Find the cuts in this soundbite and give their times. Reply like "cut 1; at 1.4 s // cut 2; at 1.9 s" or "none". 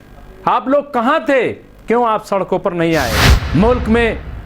cut 1; at 3.3 s